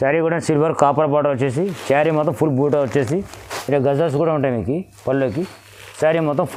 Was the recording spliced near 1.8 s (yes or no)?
no